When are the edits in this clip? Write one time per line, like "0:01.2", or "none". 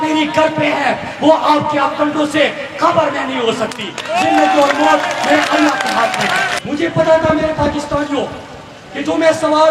0:06.6